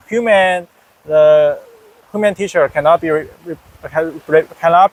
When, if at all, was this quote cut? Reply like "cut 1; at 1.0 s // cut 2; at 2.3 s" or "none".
none